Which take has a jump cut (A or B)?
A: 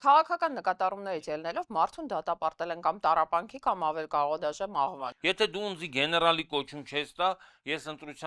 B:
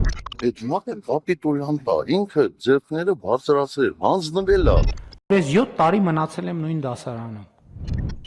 A